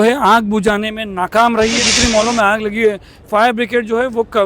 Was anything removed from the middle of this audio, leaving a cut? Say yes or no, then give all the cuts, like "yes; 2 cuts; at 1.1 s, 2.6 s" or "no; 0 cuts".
yes; 1 cut; at 1.9 s